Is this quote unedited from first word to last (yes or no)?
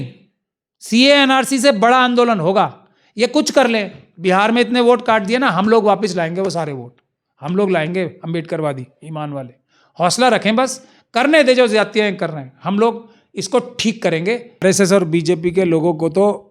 no